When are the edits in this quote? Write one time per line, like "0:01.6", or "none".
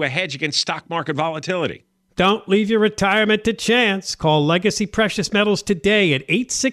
none